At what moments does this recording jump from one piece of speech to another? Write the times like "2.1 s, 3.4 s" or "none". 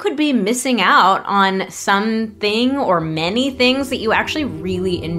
none